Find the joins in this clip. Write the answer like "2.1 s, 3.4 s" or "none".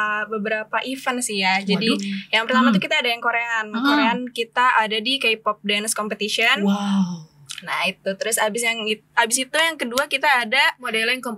none